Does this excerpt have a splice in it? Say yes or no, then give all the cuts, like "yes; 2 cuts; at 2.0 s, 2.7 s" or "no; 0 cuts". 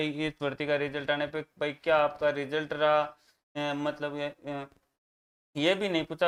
no; 0 cuts